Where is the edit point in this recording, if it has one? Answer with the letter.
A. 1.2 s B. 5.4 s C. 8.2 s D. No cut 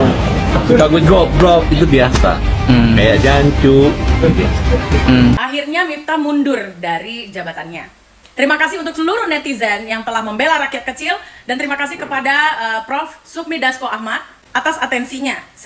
B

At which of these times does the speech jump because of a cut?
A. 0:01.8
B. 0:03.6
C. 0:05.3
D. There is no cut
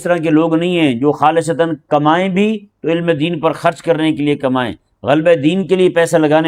D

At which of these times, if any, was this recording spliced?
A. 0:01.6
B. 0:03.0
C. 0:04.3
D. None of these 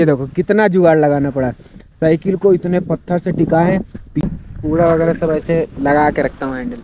C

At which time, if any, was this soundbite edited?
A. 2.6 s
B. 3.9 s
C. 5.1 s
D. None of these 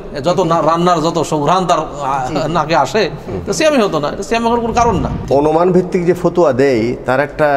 C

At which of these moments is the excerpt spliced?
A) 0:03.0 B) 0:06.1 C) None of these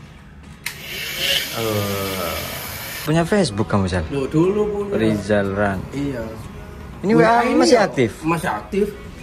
A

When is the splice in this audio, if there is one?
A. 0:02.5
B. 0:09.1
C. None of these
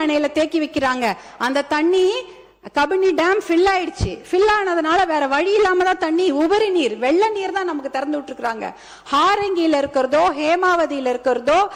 C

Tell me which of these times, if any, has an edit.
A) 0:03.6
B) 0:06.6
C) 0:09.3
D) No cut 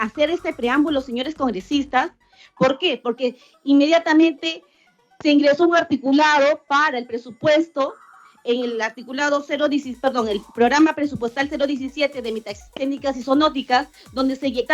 D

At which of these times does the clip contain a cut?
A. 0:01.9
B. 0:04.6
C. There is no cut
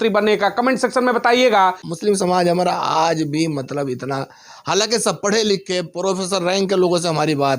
A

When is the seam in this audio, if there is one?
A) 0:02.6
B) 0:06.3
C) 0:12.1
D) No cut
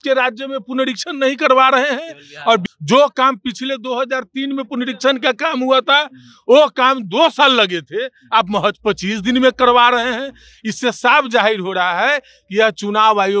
A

